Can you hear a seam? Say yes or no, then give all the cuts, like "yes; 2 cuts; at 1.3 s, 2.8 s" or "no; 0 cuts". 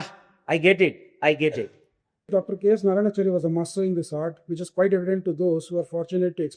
yes; 1 cut; at 2.3 s